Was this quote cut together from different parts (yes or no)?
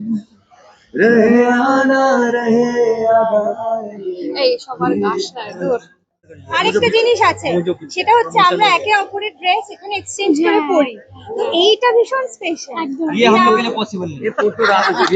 yes